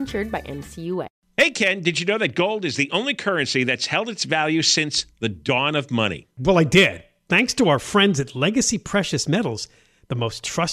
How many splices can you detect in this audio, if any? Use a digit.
1